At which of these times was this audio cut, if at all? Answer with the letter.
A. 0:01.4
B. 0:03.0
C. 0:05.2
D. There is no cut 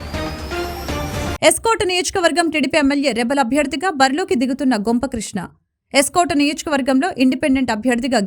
D